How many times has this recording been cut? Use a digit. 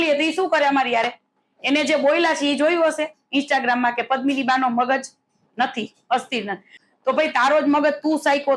1